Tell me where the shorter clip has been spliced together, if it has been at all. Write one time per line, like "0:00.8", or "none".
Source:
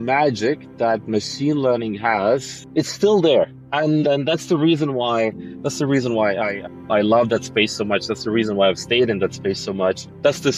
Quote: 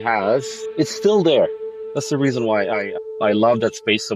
0:01.7